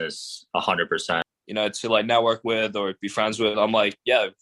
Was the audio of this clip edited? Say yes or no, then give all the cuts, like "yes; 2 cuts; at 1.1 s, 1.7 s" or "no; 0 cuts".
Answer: yes; 1 cut; at 1.3 s